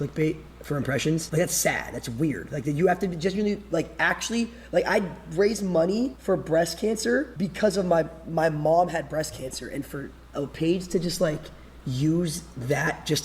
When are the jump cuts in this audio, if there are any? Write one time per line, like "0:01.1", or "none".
0:01.3
0:06.2
0:07.3